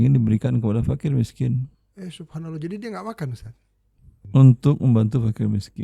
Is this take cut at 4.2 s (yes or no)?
yes